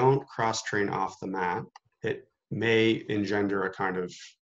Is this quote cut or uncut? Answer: cut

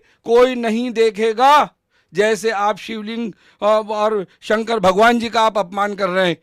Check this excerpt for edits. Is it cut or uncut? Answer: uncut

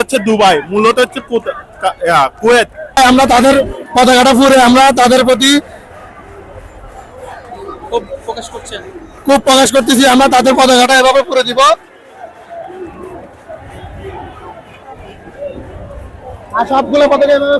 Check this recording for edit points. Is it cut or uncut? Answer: cut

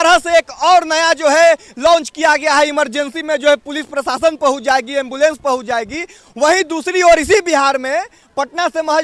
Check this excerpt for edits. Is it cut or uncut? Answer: uncut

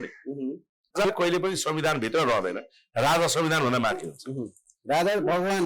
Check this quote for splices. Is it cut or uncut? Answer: cut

